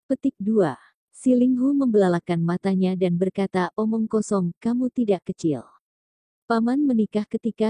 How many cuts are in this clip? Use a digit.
1